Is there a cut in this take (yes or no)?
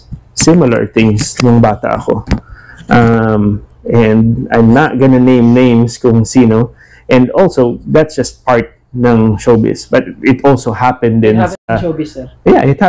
no